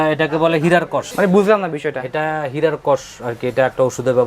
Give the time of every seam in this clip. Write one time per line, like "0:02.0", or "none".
none